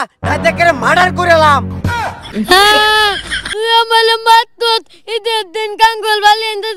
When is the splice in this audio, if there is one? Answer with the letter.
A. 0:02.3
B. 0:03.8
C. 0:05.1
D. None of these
A